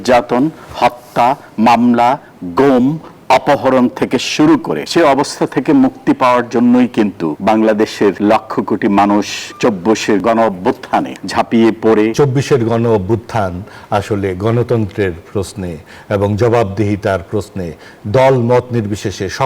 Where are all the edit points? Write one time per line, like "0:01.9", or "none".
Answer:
0:04.8
0:07.3
0:08.2
0:09.9
0:11.2
0:12.1